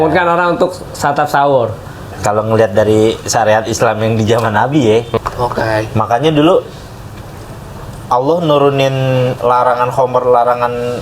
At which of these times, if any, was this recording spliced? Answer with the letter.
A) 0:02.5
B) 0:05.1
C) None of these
B